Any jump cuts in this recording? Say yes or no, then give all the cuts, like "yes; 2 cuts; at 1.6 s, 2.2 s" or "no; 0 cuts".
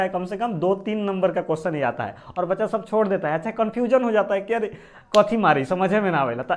no; 0 cuts